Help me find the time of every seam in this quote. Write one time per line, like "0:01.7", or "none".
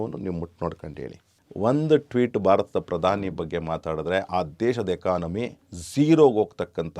0:01.2